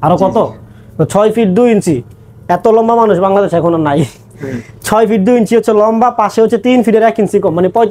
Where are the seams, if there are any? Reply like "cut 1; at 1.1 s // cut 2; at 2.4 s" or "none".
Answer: none